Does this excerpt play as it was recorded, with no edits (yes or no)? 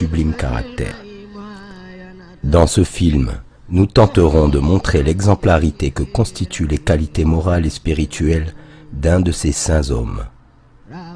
no